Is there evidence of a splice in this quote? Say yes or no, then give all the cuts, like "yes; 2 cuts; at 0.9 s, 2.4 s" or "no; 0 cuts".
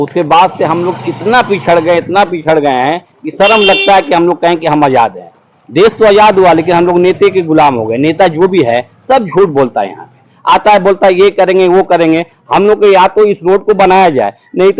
no; 0 cuts